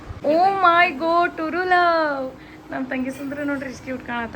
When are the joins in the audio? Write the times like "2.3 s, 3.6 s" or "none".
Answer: none